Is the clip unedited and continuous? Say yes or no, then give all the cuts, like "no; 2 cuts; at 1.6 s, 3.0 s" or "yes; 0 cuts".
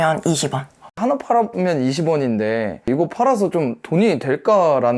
no; 2 cuts; at 1.0 s, 2.9 s